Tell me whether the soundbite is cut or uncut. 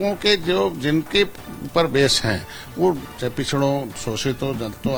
uncut